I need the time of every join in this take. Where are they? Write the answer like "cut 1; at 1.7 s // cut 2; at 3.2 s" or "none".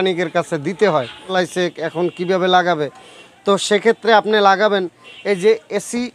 cut 1; at 1.2 s